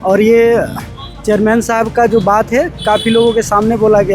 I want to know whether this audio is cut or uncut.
uncut